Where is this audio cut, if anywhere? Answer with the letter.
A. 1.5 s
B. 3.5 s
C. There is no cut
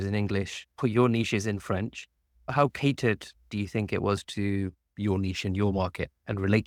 C